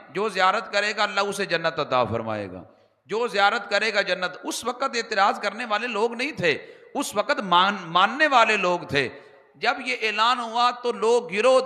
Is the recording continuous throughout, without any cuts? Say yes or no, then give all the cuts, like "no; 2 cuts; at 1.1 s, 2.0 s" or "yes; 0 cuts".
yes; 0 cuts